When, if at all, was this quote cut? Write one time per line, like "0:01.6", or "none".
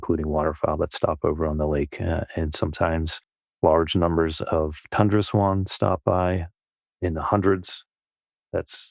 none